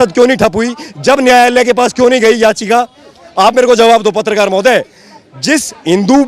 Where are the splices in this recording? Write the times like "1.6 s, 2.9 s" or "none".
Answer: none